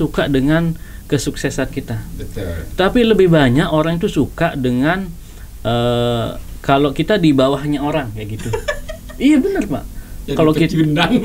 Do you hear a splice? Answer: no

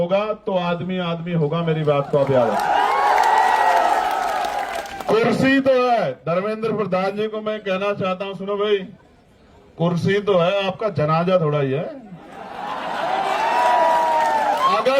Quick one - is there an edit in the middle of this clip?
yes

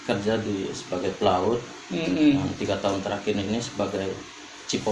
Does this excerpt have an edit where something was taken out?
no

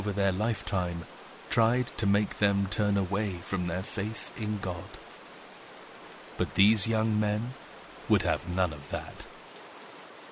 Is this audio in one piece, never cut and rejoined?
yes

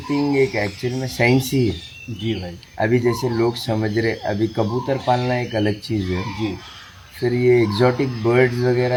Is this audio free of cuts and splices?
yes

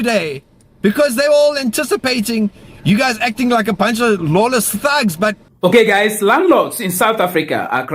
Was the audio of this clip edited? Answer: yes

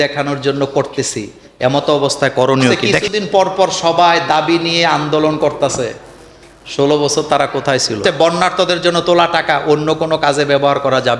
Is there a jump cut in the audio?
yes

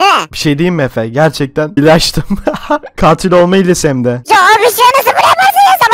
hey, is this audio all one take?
no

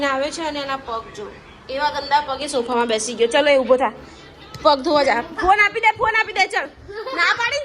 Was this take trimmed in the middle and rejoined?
no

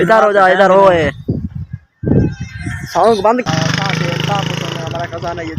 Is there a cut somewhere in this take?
yes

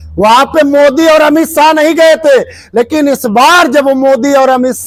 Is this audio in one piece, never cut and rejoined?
yes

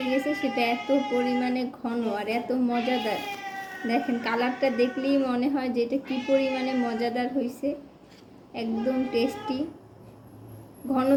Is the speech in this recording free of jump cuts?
yes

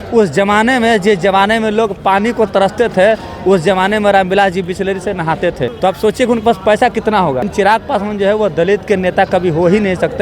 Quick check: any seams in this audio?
yes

